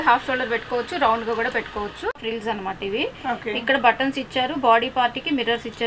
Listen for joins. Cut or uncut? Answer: cut